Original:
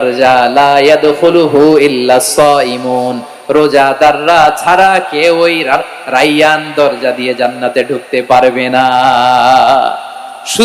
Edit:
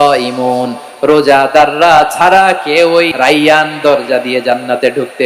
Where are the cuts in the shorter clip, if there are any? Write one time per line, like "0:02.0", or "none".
0:03.1